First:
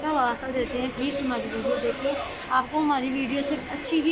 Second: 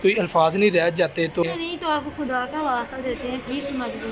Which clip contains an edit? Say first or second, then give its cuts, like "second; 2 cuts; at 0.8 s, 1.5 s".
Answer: second; 1 cut; at 1.4 s